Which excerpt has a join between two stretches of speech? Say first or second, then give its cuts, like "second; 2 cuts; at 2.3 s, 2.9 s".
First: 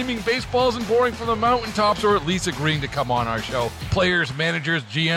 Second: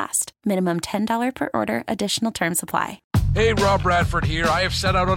second; 1 cut; at 3.0 s